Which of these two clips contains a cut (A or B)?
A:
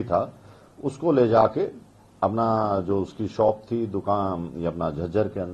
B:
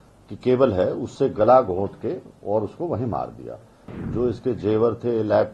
B